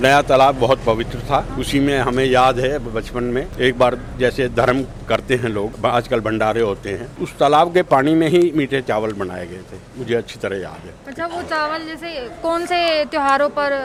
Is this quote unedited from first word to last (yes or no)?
yes